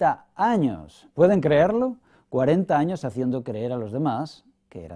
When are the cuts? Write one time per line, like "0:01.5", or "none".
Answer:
0:02.2